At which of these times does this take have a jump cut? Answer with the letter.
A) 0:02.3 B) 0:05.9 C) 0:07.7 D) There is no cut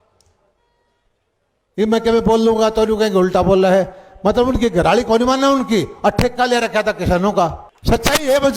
C